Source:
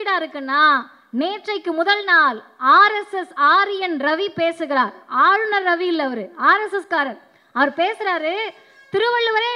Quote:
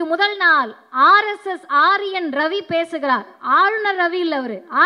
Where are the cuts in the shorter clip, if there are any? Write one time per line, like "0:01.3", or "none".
none